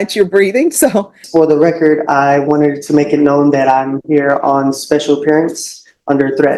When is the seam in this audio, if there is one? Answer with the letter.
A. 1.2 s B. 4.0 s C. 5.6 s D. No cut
A